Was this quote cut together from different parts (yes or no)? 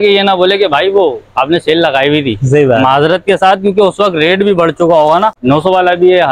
yes